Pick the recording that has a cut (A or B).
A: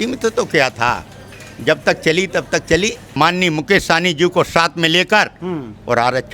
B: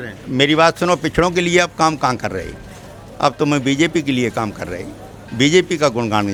A